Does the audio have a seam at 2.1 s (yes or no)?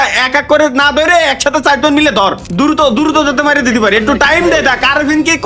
yes